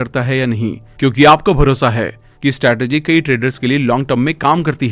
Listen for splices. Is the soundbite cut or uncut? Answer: uncut